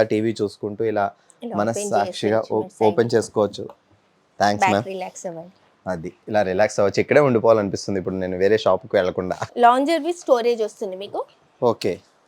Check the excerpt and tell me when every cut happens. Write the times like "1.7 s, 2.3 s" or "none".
9.4 s